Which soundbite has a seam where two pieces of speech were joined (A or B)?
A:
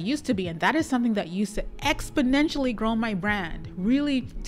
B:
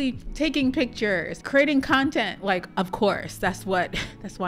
B